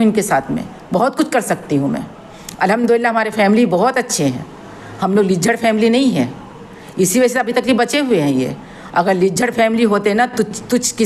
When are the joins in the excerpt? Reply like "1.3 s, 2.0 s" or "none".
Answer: none